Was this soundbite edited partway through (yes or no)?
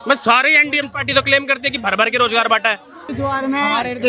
yes